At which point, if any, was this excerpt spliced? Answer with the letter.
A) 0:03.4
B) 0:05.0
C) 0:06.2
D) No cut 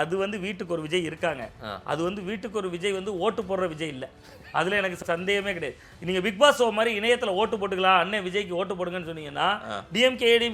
B